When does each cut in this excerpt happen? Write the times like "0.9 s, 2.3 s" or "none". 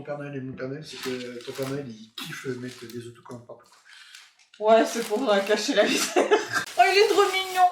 6.6 s

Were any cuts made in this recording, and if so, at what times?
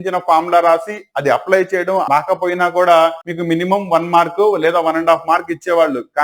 2.0 s, 3.3 s

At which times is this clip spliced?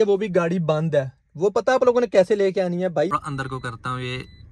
3.1 s

